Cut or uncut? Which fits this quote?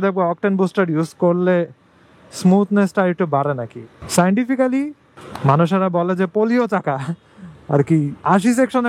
cut